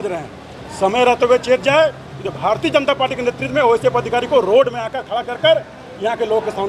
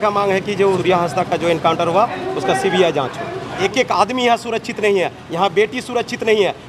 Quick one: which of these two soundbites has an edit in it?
second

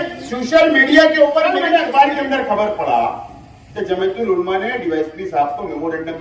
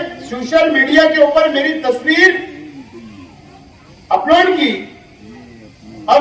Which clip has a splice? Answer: first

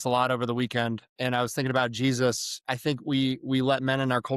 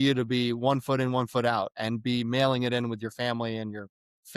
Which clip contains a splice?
first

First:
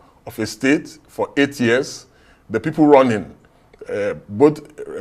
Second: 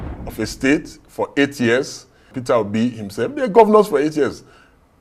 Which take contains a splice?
second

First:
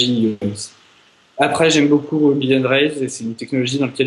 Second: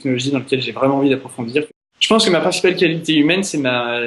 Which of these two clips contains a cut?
second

